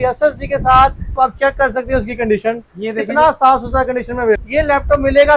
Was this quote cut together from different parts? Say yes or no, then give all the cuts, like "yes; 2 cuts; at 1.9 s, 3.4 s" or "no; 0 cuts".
yes; 2 cuts; at 1.1 s, 4.4 s